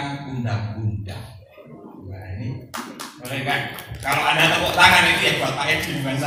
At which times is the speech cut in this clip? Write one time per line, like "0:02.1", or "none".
none